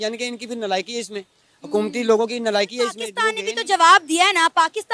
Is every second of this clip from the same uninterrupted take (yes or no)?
no